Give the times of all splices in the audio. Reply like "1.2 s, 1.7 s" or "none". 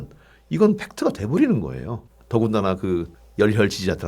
3.2 s